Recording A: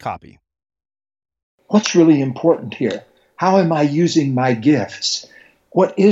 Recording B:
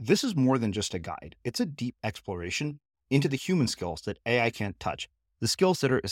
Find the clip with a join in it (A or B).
A